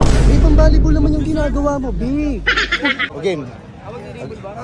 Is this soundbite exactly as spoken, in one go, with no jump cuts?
no; 1 cut; at 3.1 s

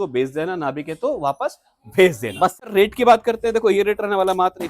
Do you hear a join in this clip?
yes; 1 cut; at 2.7 s

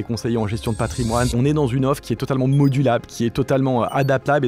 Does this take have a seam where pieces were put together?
yes; 1 cut; at 1.3 s

